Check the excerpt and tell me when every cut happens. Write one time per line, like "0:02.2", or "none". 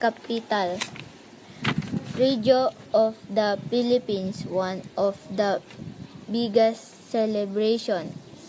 0:04.4